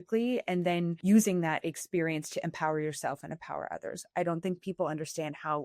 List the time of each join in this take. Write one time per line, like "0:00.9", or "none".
0:01.0